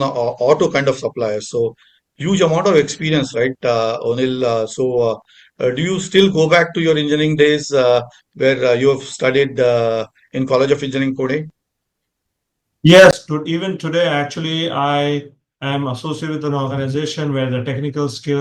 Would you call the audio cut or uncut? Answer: uncut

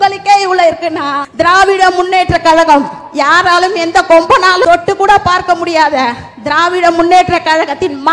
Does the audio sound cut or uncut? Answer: cut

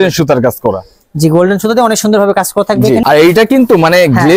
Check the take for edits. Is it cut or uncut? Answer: cut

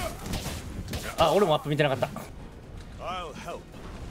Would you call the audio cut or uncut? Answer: cut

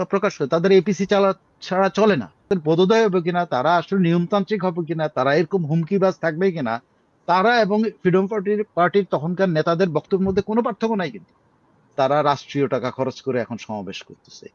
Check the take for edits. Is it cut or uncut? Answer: cut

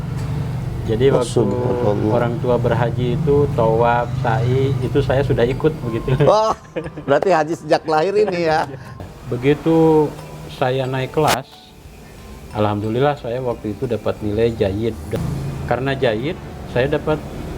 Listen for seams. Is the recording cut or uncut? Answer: cut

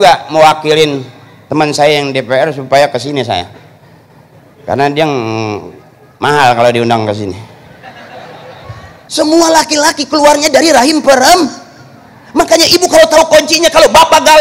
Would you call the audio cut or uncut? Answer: cut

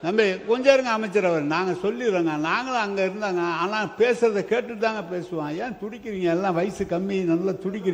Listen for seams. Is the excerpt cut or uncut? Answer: uncut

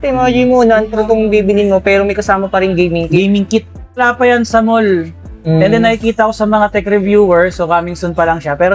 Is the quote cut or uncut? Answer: cut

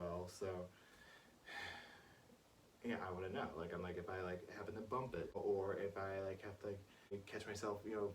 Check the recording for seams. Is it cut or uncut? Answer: cut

